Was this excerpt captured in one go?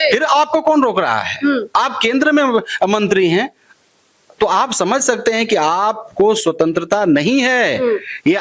yes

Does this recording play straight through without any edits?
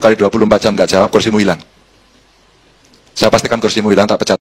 yes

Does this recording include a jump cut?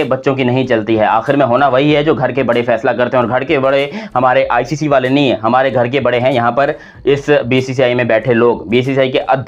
no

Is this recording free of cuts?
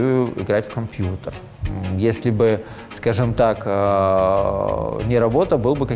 yes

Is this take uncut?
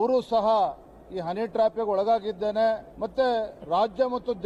yes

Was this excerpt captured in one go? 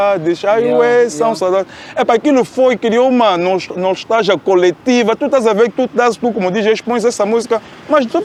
yes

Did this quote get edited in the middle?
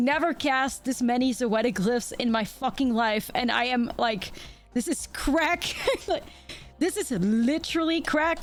no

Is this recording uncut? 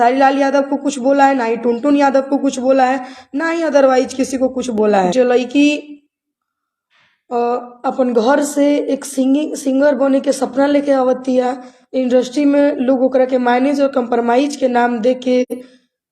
no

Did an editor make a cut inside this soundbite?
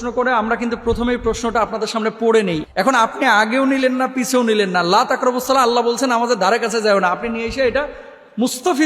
yes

